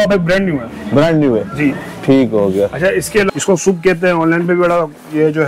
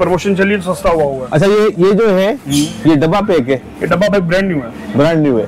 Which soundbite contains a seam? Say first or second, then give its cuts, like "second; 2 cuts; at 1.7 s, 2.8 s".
first; 1 cut; at 3.3 s